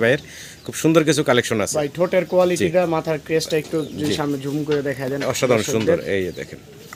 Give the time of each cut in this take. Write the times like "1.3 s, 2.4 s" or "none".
none

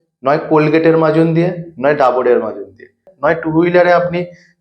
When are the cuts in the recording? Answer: 3.1 s

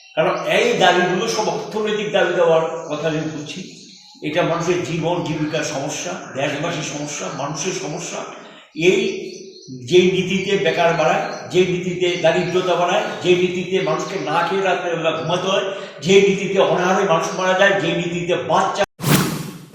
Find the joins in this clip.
18.8 s

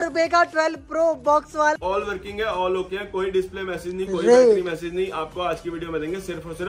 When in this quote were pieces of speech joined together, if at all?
1.8 s

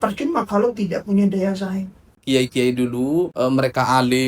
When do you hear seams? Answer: 2.2 s, 3.3 s

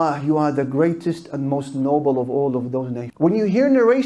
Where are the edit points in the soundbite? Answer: none

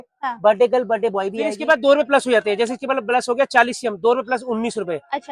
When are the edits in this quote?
1.6 s

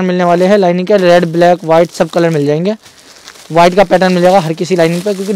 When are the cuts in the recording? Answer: none

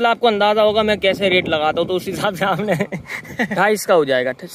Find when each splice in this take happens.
3.5 s

